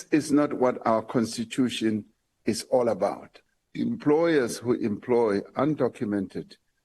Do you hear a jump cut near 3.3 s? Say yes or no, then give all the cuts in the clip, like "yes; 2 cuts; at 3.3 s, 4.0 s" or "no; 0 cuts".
yes; 1 cut; at 3.3 s